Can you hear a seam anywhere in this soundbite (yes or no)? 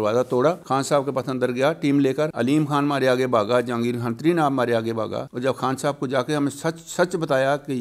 no